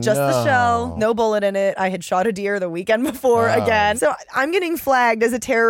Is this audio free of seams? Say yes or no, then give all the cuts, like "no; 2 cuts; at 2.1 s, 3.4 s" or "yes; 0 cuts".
no; 2 cuts; at 0.9 s, 4.0 s